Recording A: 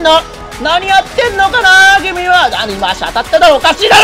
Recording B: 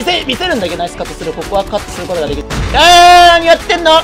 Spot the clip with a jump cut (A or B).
B